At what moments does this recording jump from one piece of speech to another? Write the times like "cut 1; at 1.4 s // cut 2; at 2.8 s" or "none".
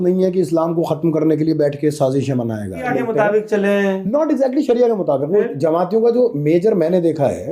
cut 1; at 2.7 s